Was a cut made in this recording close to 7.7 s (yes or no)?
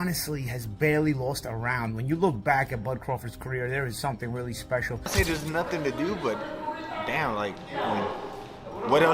no